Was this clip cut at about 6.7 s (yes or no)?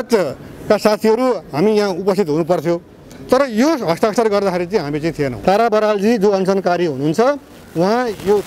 no